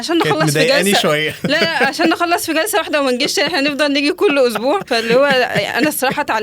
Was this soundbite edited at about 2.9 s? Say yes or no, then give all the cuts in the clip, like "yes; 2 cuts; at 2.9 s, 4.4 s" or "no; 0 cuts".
no; 1 cut; at 4.9 s